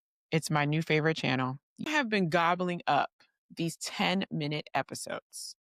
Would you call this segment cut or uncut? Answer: cut